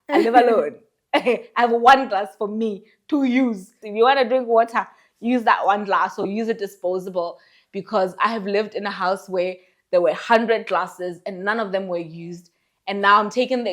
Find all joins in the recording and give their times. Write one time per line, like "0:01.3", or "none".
0:03.8